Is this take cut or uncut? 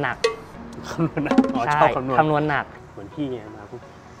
cut